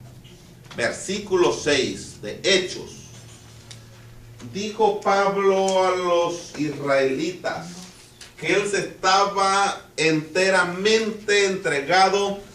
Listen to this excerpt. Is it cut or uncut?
uncut